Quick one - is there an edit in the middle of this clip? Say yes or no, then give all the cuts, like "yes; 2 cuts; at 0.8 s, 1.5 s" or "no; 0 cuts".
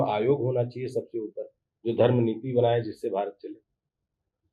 no; 0 cuts